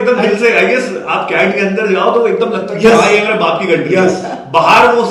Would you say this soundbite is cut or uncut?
uncut